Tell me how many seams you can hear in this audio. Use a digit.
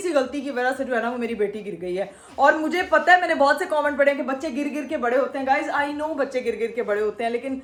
0